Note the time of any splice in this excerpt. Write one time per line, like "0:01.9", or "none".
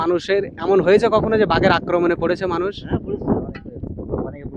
none